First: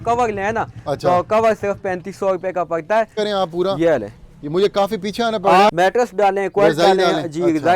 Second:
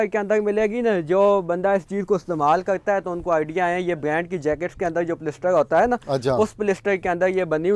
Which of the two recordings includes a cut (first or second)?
first